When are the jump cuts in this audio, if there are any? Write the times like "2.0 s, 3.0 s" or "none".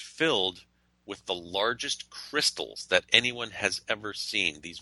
none